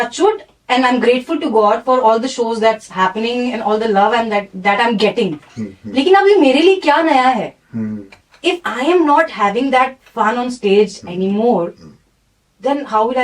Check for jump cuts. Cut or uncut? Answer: cut